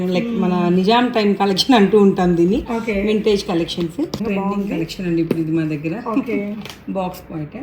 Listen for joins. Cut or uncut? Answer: cut